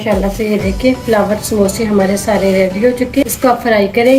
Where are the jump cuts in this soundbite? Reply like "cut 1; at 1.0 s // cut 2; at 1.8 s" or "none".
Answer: cut 1; at 3.2 s